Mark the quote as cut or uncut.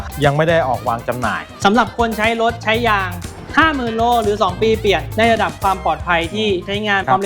cut